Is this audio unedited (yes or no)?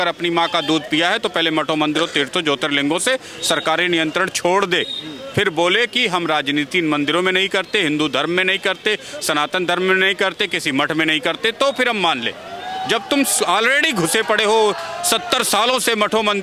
yes